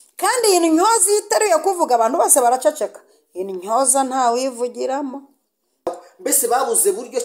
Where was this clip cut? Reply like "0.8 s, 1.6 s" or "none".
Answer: 5.9 s